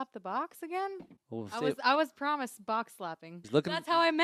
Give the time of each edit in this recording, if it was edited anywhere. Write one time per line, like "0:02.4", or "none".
0:01.1
0:03.3

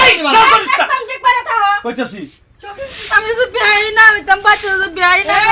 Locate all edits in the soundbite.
0:02.7

